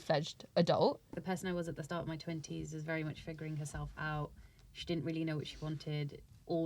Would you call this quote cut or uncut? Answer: cut